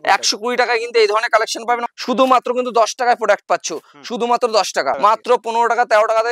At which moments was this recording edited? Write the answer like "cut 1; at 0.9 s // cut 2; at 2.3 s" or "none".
cut 1; at 1.8 s // cut 2; at 5.0 s